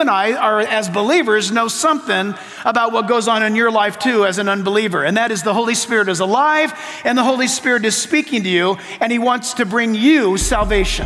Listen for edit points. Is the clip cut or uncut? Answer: uncut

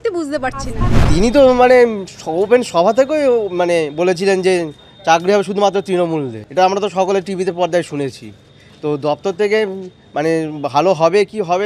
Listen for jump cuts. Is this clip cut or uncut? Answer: cut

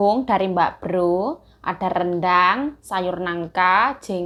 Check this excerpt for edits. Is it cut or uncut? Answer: uncut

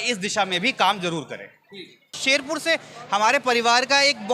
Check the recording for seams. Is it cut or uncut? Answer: cut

